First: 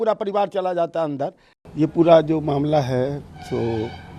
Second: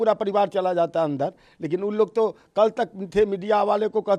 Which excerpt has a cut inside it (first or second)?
first